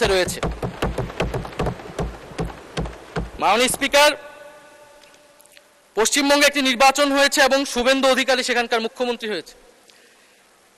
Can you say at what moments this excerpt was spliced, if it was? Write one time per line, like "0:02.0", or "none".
none